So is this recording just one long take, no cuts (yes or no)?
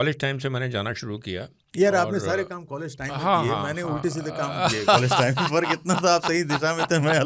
yes